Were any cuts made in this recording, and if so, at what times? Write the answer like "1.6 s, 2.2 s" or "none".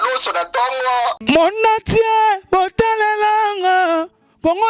1.2 s